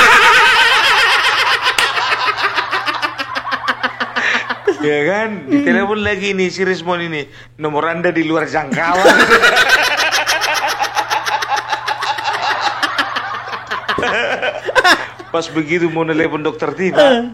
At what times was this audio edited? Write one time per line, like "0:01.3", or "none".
0:04.5

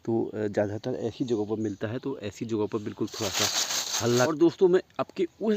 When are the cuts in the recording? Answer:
0:04.3

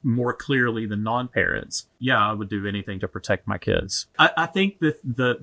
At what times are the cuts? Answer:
0:01.8
0:04.0

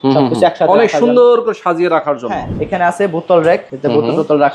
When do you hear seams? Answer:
0:02.5
0:03.7

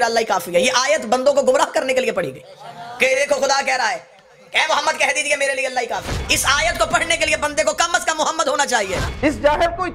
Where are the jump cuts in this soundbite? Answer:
0:06.2
0:09.1

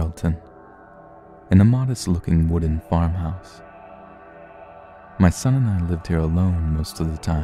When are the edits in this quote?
none

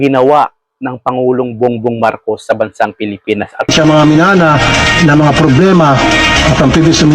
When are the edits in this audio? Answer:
0:03.7

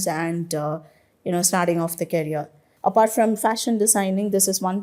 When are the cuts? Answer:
0:02.6

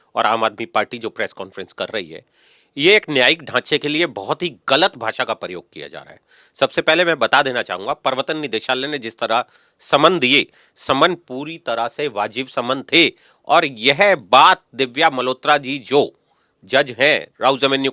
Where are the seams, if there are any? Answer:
none

